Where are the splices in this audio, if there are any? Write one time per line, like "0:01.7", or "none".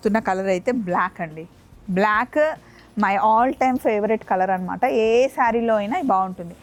none